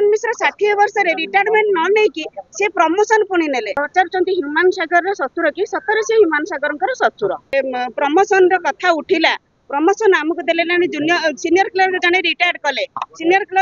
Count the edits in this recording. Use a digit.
2